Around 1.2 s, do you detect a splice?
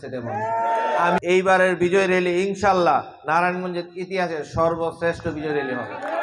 yes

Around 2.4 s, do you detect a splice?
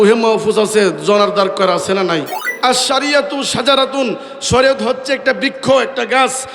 yes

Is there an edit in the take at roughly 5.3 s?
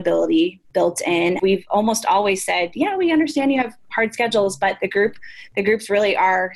no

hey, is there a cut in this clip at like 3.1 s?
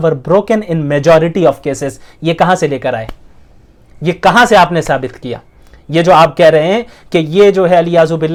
no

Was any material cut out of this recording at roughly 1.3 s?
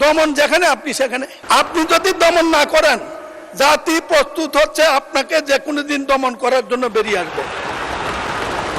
yes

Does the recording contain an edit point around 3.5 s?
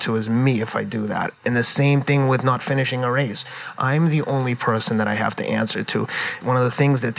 no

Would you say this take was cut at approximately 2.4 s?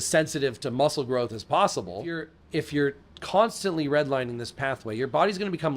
yes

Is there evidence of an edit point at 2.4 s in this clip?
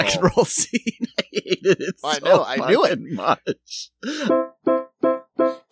no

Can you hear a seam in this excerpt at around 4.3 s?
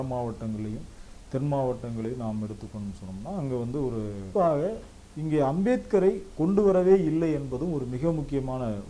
yes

